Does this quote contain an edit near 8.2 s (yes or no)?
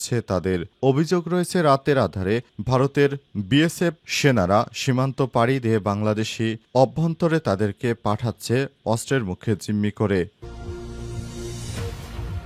no